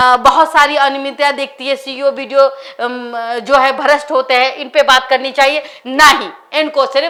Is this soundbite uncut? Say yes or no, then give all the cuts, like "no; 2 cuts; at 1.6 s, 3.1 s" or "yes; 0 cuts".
yes; 0 cuts